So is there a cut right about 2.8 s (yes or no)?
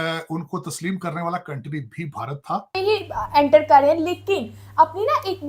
yes